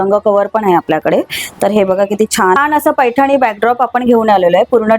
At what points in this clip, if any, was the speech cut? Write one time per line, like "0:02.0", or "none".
0:02.6

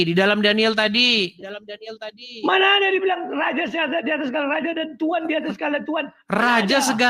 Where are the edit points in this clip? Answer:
none

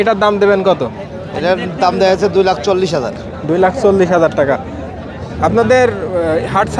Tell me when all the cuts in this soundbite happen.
none

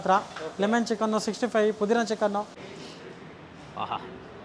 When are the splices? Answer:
0:02.5

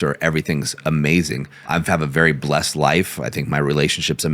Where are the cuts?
0:01.7

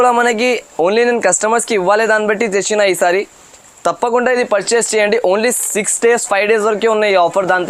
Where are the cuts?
none

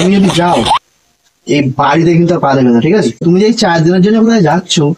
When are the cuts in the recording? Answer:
0:03.2

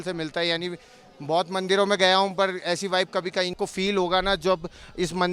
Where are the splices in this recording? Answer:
0:03.6

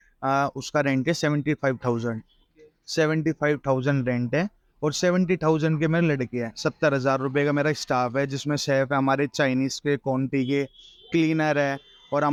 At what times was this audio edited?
none

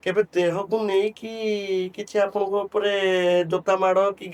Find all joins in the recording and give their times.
none

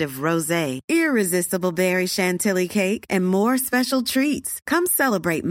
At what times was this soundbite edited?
none

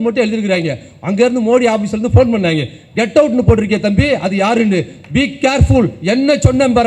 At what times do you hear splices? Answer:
none

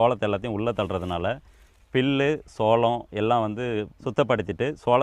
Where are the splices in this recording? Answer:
0:04.0

